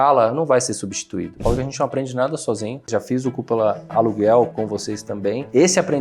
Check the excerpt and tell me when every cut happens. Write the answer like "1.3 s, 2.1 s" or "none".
1.4 s, 2.9 s, 3.9 s, 4.5 s